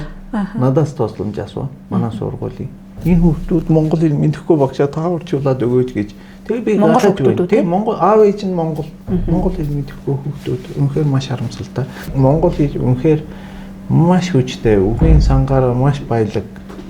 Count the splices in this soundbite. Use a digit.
1